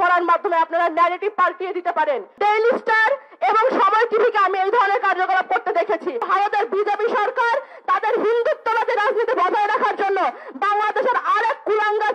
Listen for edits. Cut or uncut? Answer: cut